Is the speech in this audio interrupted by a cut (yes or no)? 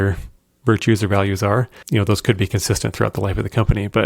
yes